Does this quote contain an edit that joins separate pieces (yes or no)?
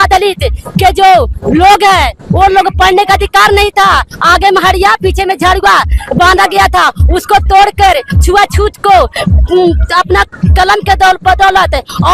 no